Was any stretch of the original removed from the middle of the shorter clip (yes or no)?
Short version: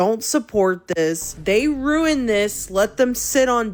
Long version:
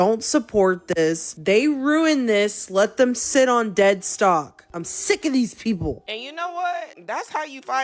no